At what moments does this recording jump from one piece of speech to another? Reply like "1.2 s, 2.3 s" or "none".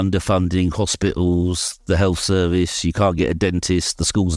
none